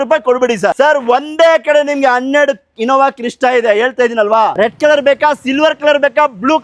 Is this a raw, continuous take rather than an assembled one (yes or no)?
no